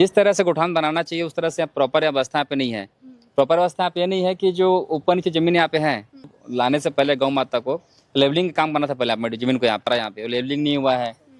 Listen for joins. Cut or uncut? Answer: cut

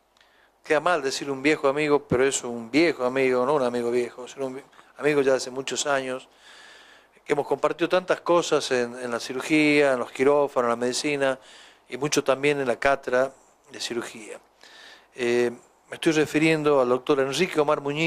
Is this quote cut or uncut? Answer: uncut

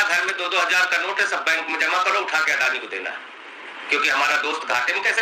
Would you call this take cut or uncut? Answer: uncut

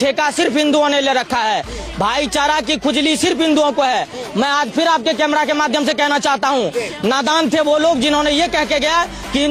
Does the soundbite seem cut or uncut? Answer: uncut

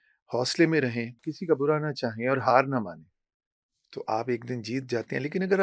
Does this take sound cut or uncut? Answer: cut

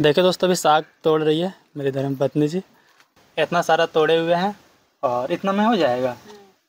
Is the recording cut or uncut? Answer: cut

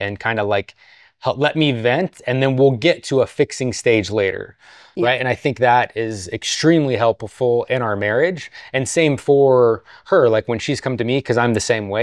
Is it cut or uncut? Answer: uncut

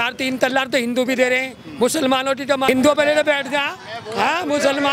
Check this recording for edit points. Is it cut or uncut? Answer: cut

